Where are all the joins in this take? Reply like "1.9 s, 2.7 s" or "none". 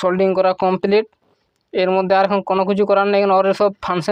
none